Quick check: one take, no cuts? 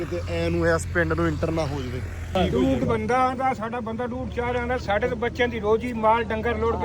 no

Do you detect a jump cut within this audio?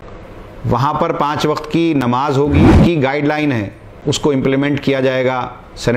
yes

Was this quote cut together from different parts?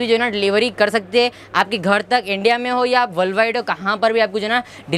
no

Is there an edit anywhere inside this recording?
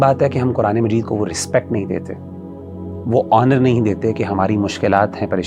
no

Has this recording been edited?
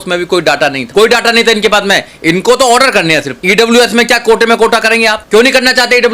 yes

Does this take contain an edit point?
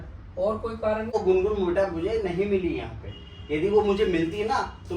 yes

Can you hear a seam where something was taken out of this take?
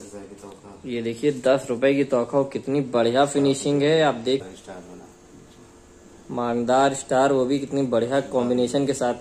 yes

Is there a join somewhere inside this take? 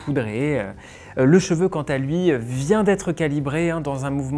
no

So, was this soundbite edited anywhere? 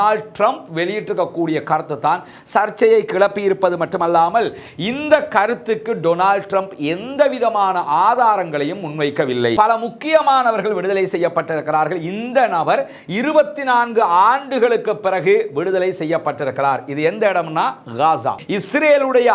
yes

